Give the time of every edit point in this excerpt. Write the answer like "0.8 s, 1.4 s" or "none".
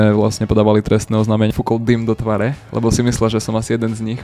1.5 s